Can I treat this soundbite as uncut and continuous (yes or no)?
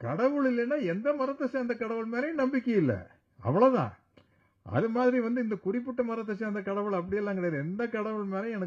yes